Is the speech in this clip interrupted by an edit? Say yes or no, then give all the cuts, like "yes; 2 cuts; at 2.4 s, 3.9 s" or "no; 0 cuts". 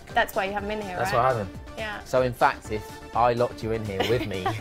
yes; 1 cut; at 1.9 s